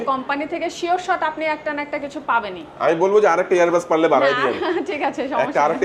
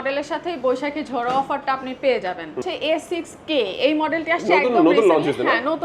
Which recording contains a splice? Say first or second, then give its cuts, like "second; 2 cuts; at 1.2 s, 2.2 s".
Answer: second; 1 cut; at 2.6 s